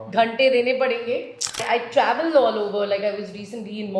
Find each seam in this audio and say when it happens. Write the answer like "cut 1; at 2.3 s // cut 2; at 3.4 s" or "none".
cut 1; at 1.6 s